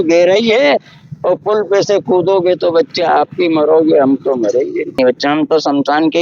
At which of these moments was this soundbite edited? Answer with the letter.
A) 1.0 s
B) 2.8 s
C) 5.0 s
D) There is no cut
C